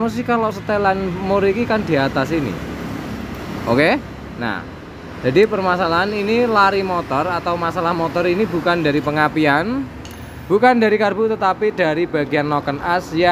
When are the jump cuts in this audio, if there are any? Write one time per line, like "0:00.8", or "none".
none